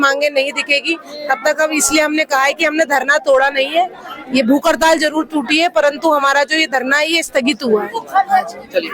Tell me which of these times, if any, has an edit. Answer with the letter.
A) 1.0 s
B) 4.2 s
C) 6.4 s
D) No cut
D